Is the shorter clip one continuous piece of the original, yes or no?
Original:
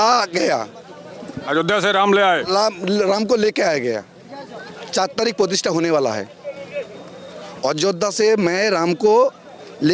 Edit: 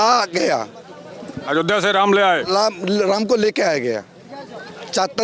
yes